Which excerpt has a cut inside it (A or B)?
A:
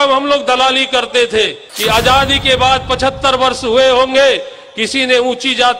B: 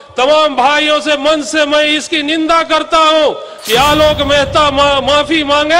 A